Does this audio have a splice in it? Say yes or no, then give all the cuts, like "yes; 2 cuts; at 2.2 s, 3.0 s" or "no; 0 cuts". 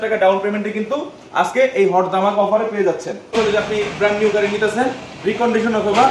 yes; 1 cut; at 3.3 s